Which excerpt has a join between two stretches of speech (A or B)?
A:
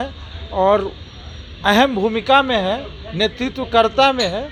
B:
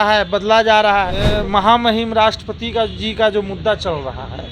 B